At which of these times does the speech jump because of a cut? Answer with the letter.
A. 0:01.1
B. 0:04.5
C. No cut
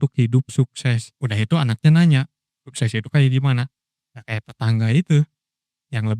A